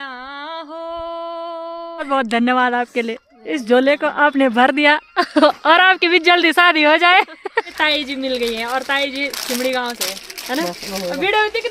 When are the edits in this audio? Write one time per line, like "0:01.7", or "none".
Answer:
0:01.9
0:07.7